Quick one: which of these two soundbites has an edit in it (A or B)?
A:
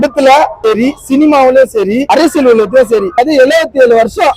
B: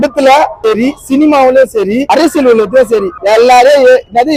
A